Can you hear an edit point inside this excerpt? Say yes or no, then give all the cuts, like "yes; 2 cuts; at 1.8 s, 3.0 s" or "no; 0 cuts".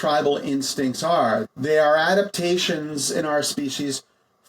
yes; 1 cut; at 1.4 s